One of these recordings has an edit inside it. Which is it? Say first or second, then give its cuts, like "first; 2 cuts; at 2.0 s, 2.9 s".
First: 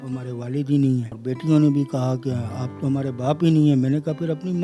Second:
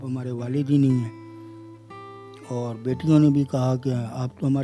first; 1 cut; at 1.1 s